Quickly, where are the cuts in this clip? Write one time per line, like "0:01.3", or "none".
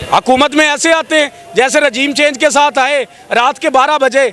none